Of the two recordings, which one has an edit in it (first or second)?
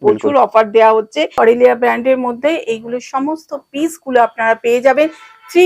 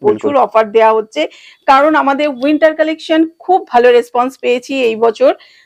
first